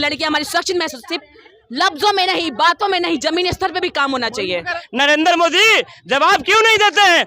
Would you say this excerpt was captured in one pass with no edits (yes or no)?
no